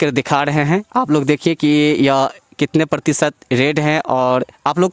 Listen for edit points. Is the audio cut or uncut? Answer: uncut